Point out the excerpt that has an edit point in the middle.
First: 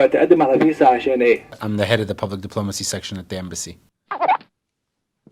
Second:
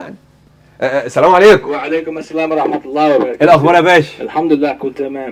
first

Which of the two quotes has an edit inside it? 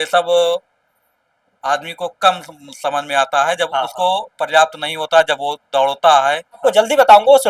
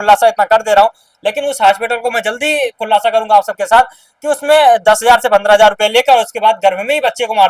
first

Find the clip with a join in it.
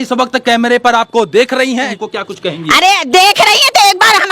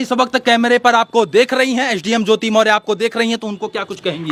first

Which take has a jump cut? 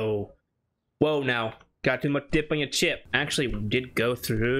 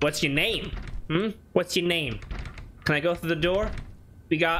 first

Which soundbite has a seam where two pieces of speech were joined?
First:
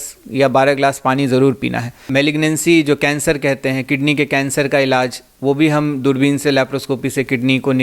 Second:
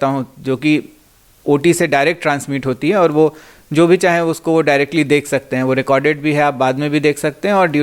first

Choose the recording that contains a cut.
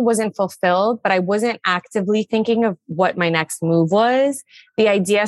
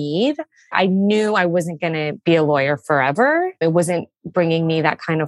second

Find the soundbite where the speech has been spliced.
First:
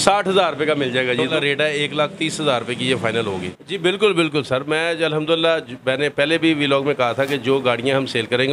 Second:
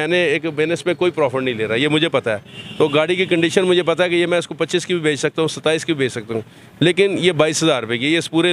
first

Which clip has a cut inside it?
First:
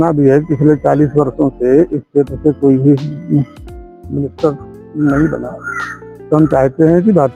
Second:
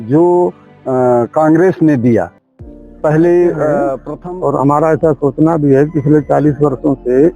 second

